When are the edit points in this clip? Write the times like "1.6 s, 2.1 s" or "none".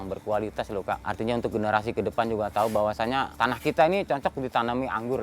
1.1 s, 3.3 s